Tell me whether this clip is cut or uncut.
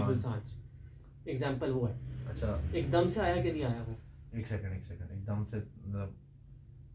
uncut